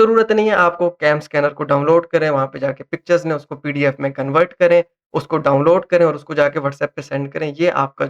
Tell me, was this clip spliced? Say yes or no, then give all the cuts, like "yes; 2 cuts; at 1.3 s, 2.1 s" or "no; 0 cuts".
no; 0 cuts